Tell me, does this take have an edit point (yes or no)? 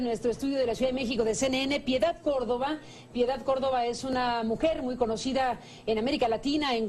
yes